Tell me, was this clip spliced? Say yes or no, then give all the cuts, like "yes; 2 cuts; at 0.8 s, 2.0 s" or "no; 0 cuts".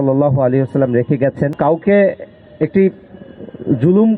yes; 1 cut; at 1.5 s